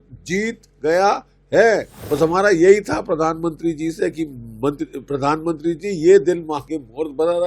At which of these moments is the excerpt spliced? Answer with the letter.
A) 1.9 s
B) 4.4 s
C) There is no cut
A